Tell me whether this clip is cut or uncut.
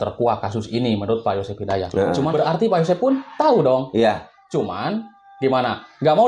cut